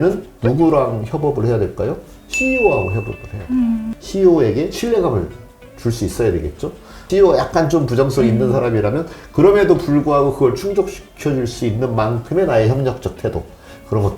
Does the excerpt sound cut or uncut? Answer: cut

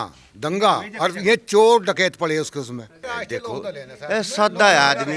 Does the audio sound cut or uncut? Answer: cut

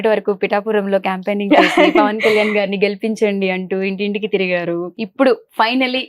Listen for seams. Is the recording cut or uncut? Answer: cut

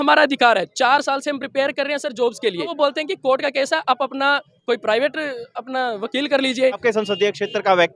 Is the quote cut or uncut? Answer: cut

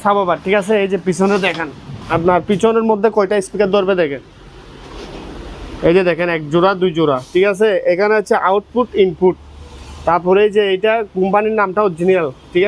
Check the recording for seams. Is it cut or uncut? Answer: uncut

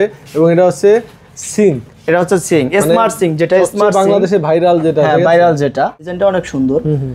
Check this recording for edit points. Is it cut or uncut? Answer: cut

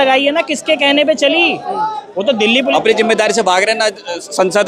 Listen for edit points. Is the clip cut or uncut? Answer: cut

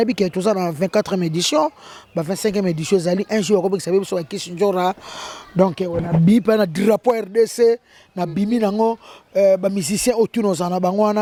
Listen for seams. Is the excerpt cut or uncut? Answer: uncut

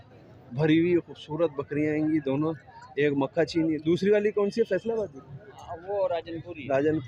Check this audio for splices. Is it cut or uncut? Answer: uncut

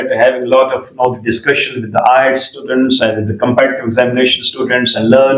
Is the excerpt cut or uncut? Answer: uncut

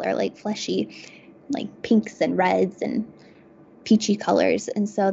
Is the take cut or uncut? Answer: uncut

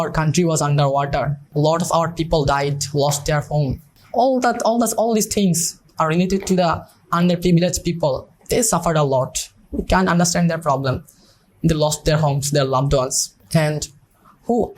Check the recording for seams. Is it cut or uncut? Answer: cut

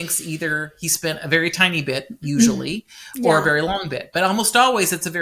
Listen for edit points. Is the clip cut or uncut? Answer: uncut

